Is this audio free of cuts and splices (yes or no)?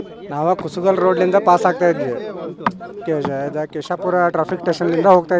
yes